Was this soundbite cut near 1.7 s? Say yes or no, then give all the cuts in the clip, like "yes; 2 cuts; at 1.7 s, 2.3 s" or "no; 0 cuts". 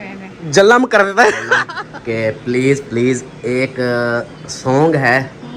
yes; 1 cut; at 1.7 s